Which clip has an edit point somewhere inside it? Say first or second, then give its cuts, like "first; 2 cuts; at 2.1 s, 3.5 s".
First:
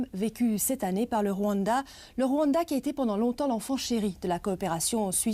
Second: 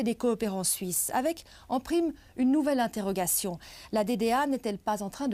first; 1 cut; at 3.6 s